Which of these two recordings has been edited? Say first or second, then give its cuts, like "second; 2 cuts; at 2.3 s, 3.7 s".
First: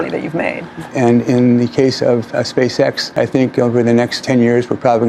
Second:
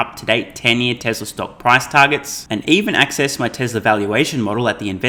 first; 3 cuts; at 0.9 s, 3.0 s, 4.2 s